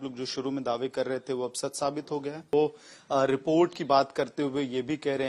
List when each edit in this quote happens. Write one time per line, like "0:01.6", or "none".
0:02.5